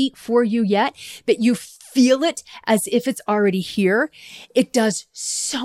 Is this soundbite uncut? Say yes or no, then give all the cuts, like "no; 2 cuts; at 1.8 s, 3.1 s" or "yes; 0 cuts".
yes; 0 cuts